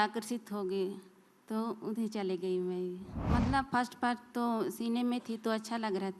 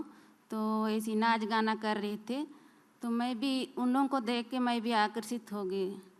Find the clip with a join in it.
first; 1 cut; at 3.1 s

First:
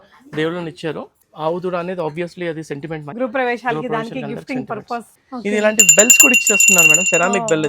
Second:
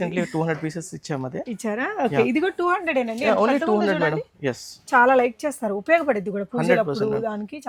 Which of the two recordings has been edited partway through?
first; 3 cuts; at 1.1 s, 3.1 s, 5.1 s

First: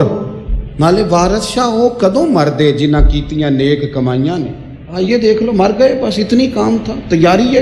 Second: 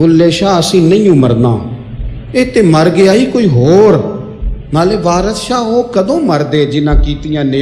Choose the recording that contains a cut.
first; 1 cut; at 4.9 s

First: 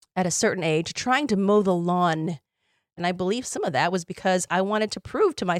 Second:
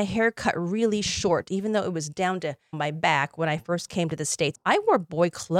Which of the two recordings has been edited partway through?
first; 1 cut; at 3.0 s

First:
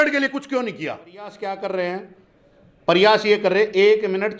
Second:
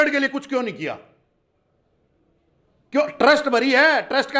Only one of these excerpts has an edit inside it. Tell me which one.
first; 1 cut; at 1.3 s

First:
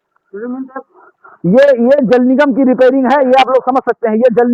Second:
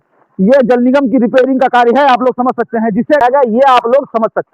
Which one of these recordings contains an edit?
second; 1 cut; at 3.2 s

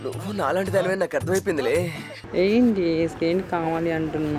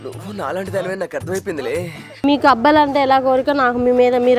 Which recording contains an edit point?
second; 1 cut; at 2.2 s

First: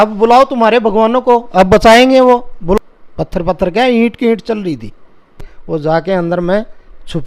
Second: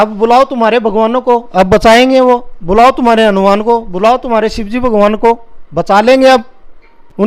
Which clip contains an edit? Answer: first; 2 cuts; at 2.8 s, 5.5 s

